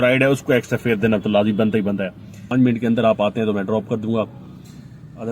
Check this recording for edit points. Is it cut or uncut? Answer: cut